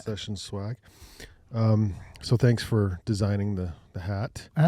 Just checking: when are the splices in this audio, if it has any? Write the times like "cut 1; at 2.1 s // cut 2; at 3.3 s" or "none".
none